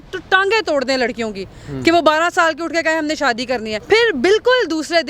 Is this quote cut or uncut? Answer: cut